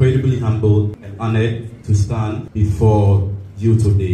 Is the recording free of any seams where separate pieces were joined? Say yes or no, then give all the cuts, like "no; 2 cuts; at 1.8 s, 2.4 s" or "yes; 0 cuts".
no; 2 cuts; at 1.0 s, 2.5 s